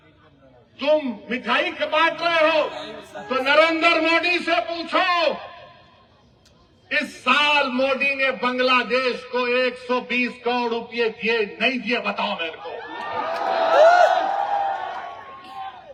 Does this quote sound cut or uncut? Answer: uncut